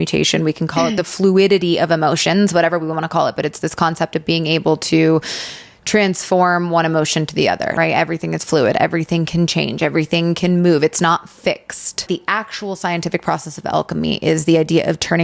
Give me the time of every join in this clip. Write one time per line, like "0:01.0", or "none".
0:07.7
0:12.1